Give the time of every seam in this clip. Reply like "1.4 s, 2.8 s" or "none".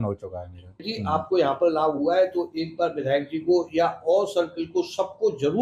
0.9 s